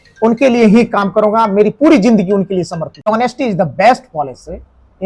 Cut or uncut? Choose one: cut